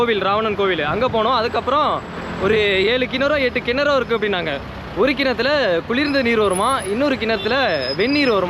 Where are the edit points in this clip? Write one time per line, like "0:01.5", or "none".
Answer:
none